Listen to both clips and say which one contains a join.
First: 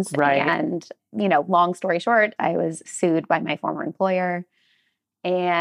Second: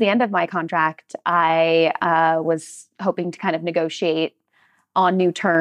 first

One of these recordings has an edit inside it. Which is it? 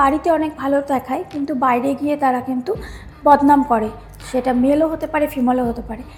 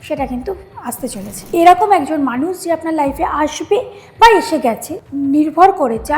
second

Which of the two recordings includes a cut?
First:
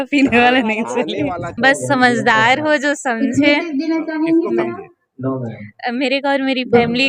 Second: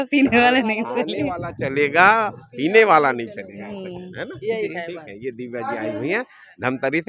first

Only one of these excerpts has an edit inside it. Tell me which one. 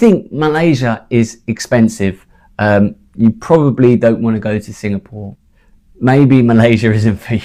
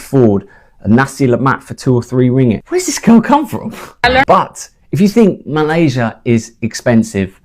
second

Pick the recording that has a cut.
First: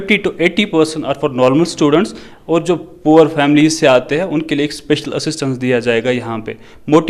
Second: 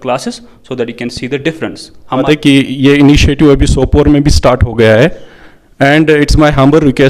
second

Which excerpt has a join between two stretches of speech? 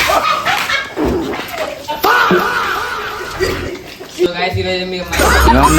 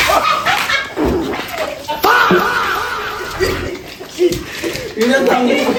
first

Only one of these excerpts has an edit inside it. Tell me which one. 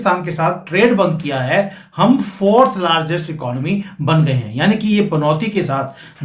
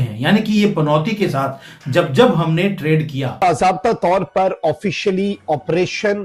second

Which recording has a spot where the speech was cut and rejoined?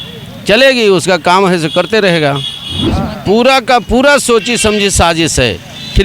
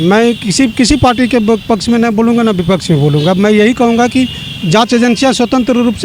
first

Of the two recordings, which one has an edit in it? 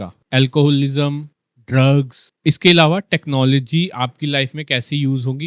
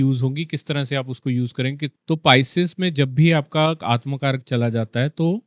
second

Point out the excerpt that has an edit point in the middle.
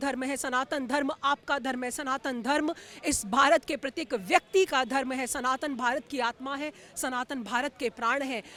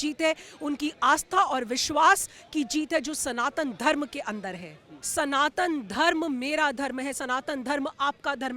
second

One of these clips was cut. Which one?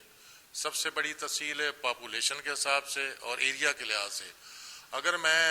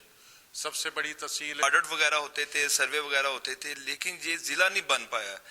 second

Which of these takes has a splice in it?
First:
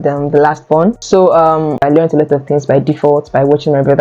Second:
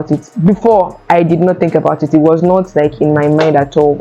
first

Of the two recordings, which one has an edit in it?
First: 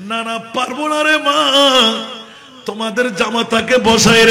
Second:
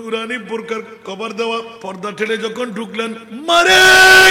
second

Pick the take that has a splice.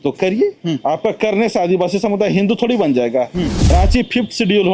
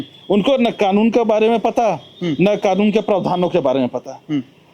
first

